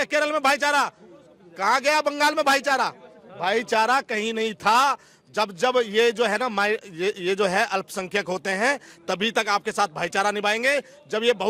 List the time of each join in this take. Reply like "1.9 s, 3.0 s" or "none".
none